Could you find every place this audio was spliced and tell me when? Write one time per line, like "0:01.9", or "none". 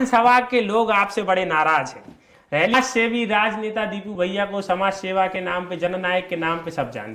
0:02.7